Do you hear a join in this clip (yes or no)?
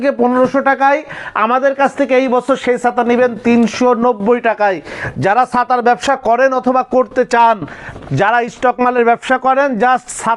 no